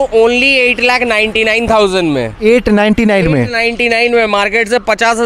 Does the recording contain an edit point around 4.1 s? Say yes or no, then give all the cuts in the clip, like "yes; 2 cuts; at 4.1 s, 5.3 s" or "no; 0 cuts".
no; 0 cuts